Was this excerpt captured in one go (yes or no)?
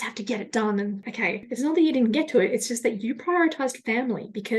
no